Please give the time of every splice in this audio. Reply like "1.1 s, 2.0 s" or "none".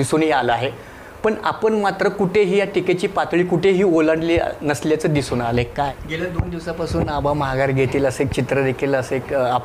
5.9 s

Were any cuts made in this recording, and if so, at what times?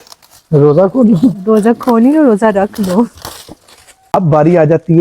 3.9 s

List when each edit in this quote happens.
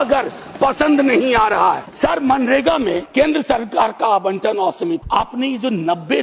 1.9 s, 3.0 s, 5.0 s

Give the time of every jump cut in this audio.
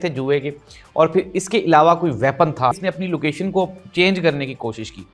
2.7 s

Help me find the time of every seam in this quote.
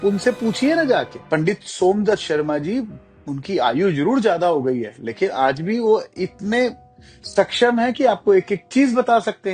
1.2 s

